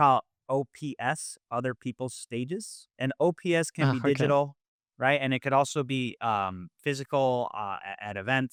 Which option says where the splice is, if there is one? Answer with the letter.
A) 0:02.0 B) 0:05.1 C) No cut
C